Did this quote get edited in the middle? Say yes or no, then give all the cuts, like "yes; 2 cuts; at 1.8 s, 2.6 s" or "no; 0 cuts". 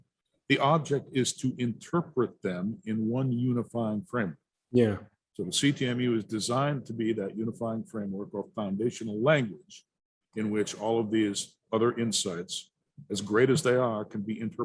no; 0 cuts